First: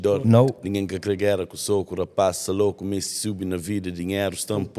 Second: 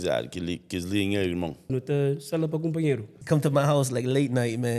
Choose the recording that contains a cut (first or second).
second